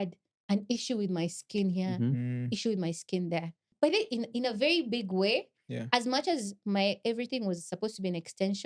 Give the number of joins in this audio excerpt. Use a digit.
1